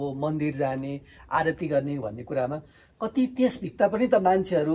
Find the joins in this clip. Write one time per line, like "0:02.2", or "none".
none